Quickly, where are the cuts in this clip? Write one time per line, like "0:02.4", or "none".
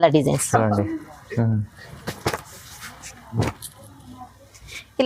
none